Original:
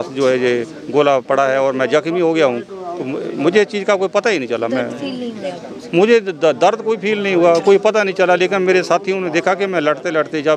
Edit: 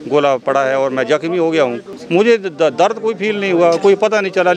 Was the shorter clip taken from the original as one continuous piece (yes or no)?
no